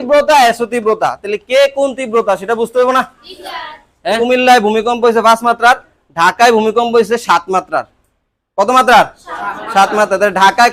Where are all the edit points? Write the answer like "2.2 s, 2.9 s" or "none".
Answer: 4.2 s

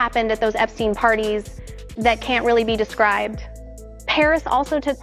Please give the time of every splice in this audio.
none

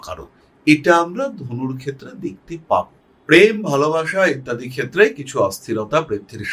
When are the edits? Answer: 3.0 s

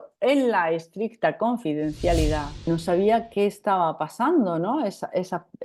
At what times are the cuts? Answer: 2.7 s

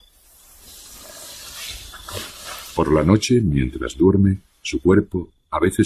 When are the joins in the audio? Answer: 3.1 s

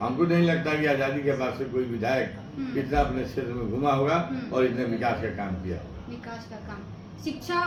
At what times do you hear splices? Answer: none

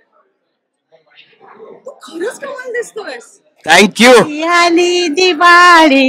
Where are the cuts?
4.4 s

